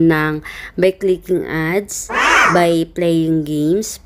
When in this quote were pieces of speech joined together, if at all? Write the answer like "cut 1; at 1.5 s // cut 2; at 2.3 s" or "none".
none